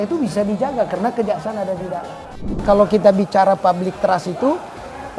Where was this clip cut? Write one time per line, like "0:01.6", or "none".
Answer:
0:02.6